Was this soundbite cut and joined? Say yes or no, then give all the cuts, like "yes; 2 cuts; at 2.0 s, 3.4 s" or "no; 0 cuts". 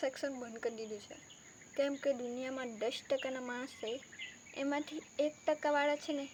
no; 0 cuts